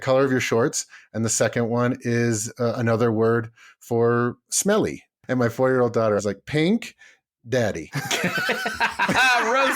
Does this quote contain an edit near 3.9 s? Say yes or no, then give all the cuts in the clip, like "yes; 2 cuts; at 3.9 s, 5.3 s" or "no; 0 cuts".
no; 0 cuts